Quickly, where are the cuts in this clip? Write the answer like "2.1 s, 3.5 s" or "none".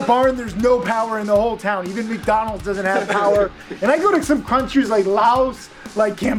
none

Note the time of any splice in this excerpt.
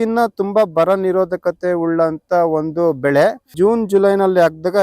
3.5 s

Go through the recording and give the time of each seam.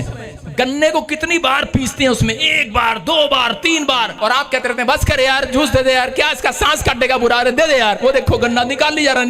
4.1 s

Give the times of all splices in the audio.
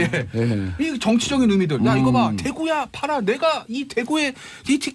2.4 s

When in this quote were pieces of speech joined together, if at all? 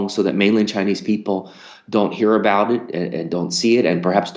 none

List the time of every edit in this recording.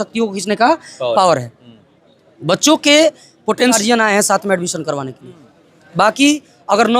3.8 s

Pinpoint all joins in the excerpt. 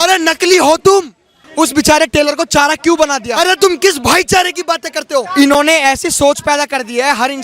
0.8 s, 3.3 s, 5.1 s

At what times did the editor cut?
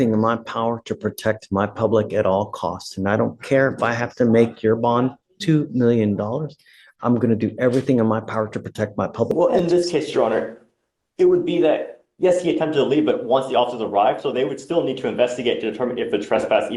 9.3 s

